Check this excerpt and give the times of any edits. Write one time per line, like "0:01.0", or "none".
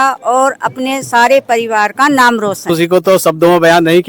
0:02.6

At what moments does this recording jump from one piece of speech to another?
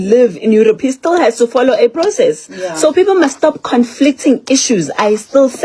none

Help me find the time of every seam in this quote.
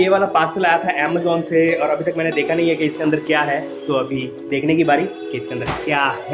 none

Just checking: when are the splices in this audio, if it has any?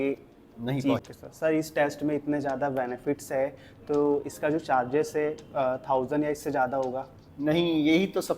0:01.0

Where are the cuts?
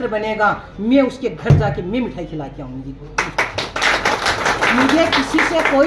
none

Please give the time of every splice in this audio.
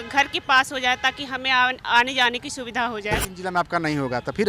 0:03.4

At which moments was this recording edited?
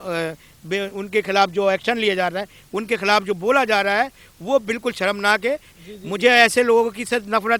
0:05.7

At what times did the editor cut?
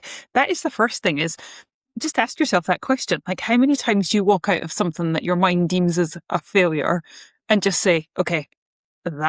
none

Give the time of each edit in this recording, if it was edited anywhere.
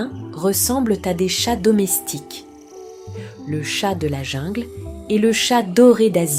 none

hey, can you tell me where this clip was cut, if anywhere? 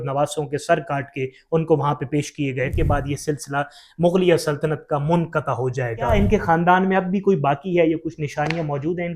0:02.8
0:06.1

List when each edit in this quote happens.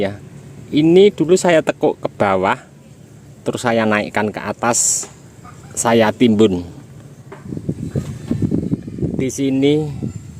0:07.5

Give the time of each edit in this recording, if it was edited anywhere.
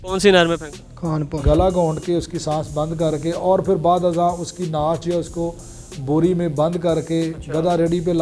0:01.3

